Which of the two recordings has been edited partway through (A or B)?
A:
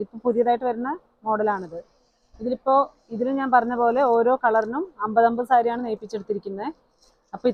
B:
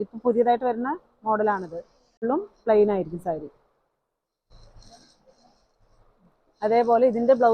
B